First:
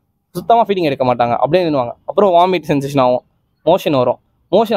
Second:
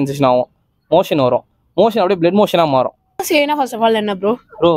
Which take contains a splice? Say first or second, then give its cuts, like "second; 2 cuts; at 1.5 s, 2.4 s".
second; 1 cut; at 3.2 s